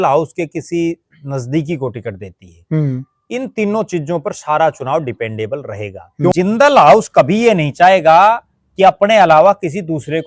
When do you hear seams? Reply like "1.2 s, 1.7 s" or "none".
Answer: 6.3 s